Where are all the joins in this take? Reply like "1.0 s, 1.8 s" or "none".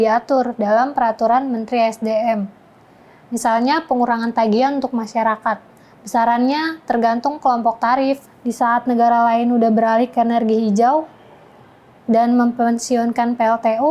8.3 s